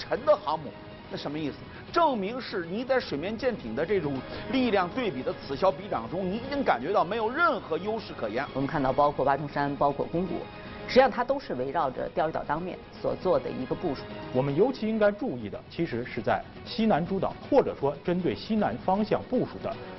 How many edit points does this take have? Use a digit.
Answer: 2